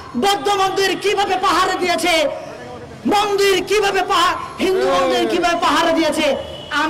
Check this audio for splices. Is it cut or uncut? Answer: uncut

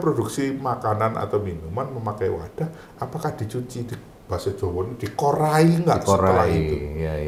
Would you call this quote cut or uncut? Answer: uncut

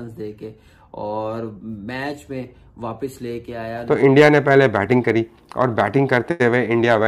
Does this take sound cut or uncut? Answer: cut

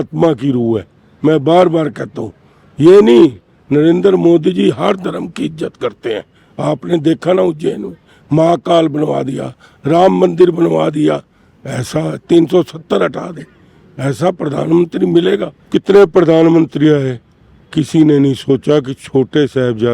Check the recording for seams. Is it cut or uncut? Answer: cut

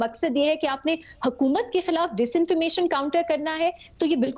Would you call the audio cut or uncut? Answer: uncut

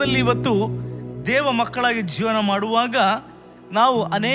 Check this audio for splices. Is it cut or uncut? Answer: uncut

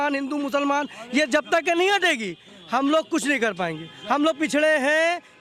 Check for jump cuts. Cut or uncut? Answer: uncut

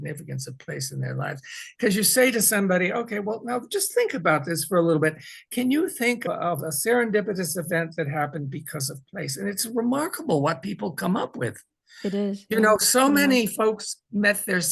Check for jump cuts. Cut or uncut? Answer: uncut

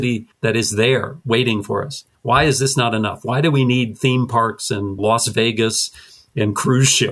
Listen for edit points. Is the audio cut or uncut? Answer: uncut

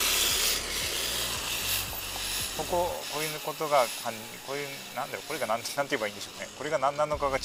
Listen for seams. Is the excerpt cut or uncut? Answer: uncut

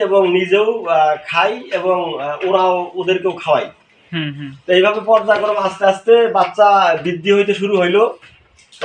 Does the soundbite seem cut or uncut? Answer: uncut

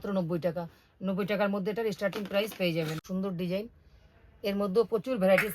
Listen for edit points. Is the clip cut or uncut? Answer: cut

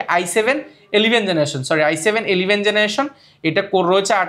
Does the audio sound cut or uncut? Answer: uncut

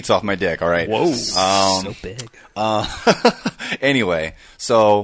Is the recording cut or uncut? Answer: uncut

